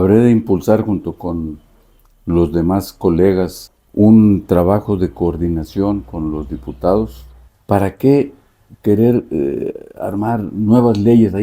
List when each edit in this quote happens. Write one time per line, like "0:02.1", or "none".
none